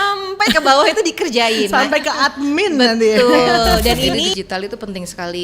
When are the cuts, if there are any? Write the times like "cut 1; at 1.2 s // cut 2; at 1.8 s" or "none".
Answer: cut 1; at 4.3 s